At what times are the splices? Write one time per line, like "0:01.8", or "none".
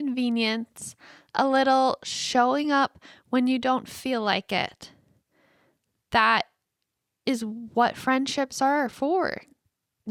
none